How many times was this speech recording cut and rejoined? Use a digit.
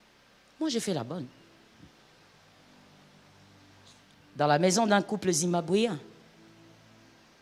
0